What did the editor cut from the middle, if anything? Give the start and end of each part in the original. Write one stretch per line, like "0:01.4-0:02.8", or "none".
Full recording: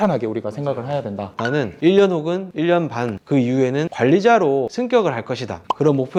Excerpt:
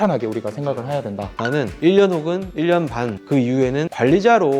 none